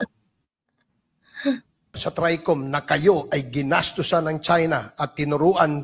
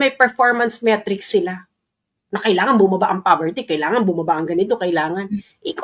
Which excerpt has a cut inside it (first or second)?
first